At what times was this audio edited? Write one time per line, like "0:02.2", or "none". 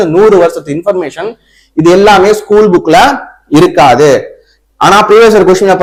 none